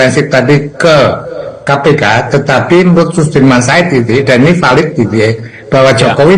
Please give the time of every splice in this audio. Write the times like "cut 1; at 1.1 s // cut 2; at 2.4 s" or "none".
none